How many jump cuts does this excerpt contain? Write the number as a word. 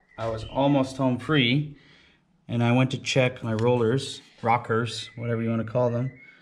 one